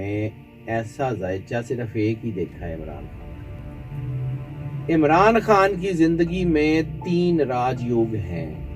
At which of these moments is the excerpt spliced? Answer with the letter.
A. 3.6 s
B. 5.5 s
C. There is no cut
A